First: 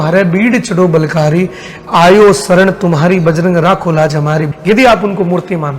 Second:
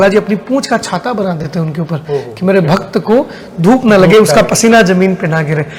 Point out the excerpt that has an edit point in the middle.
first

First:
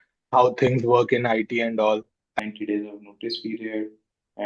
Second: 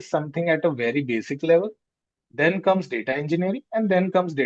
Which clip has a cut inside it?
first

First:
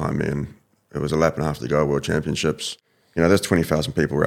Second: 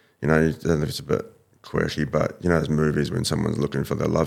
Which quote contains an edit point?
first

